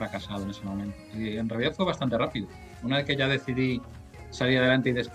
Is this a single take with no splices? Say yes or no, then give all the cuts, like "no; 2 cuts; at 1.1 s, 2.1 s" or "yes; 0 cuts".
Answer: no; 1 cut; at 1.0 s